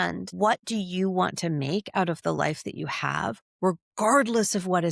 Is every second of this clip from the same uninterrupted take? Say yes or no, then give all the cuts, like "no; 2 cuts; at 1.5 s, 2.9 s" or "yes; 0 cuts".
yes; 0 cuts